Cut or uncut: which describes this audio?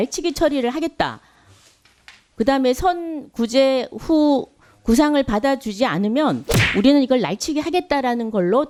uncut